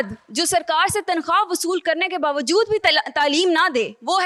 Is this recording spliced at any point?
no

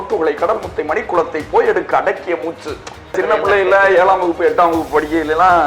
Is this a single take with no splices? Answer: no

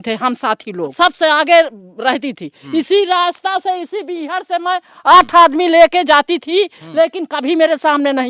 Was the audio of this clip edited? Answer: yes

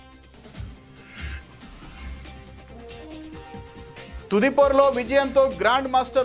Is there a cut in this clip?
yes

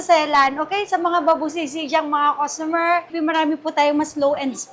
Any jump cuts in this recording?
yes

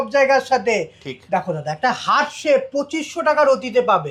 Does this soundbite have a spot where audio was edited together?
no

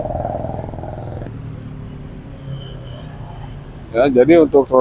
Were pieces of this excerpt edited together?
yes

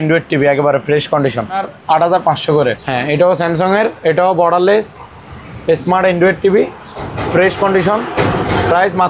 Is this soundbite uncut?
no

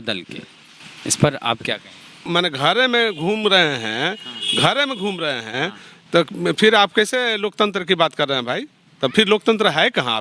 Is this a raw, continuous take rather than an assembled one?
no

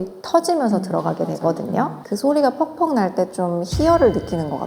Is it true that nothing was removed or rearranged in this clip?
no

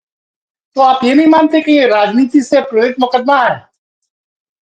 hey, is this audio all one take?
yes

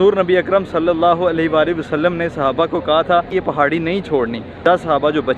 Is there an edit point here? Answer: yes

